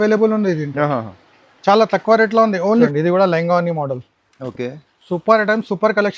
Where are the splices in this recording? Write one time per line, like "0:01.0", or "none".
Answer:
0:02.9